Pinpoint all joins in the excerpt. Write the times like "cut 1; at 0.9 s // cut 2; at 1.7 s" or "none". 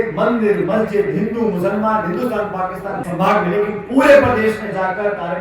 cut 1; at 3.0 s

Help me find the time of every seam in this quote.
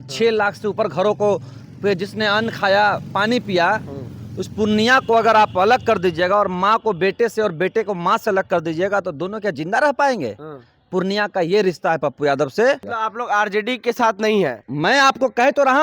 cut 1; at 12.9 s // cut 2; at 14.6 s

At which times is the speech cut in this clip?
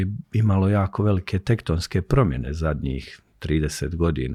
none

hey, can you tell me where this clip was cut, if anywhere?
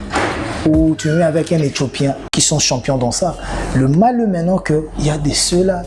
cut 1; at 2.2 s

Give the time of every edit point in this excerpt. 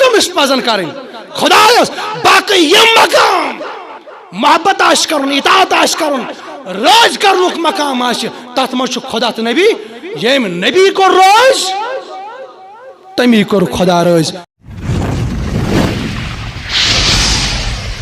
cut 1; at 14.7 s

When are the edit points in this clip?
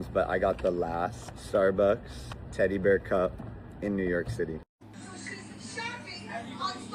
cut 1; at 4.6 s

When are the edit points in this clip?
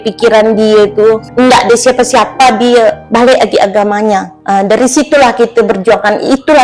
cut 1; at 1.3 s // cut 2; at 3.0 s // cut 3; at 4.3 s

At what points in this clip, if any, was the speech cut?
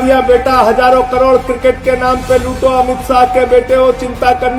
none

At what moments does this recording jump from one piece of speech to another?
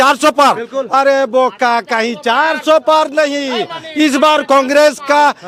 none

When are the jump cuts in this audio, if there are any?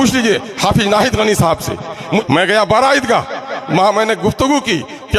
cut 1; at 2.2 s

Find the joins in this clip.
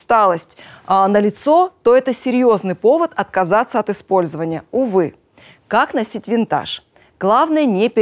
none

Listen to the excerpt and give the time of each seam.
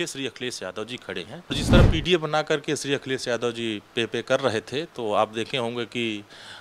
cut 1; at 1.5 s

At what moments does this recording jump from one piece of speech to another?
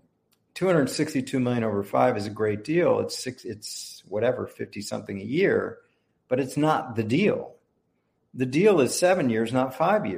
none

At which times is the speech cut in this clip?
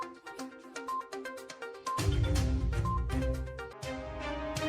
cut 1; at 1.5 s // cut 2; at 3.7 s

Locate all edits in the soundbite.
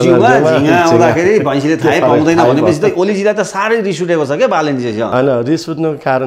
none

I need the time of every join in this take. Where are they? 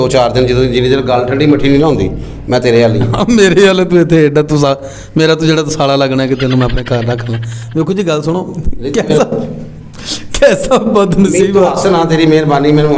none

